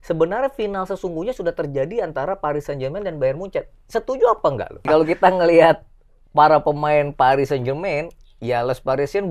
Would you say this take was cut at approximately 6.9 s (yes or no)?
no